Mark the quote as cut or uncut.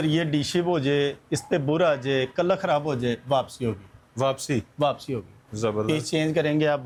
uncut